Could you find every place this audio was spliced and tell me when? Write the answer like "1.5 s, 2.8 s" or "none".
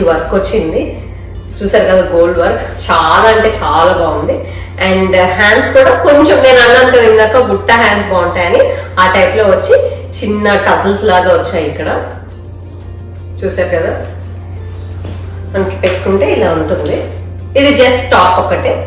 none